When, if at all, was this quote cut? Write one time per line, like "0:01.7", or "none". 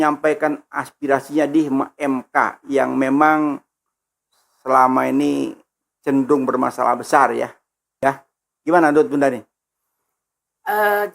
0:08.0